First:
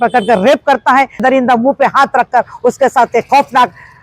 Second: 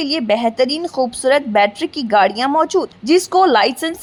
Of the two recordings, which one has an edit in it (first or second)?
first